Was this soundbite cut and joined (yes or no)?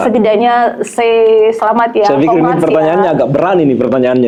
no